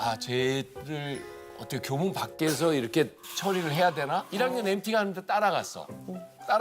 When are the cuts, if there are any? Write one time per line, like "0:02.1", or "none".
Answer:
0:04.3